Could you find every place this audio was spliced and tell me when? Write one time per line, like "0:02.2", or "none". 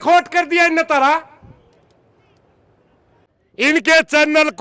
0:03.3